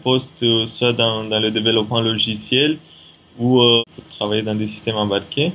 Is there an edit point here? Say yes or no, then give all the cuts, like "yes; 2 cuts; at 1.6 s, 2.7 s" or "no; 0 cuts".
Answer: yes; 1 cut; at 3.8 s